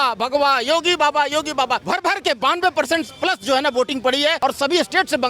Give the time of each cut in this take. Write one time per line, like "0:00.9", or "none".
0:01.8
0:04.4